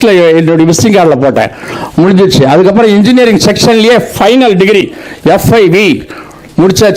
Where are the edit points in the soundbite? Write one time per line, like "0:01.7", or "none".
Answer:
none